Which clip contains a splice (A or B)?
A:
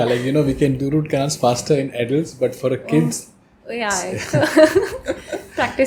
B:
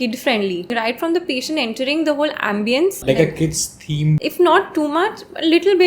B